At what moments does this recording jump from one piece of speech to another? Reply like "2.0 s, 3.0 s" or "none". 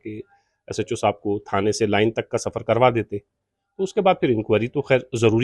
none